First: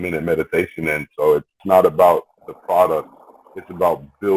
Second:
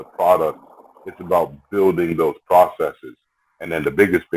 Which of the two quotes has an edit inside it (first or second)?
first